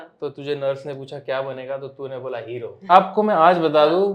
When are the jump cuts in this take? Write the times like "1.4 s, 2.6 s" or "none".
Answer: 2.9 s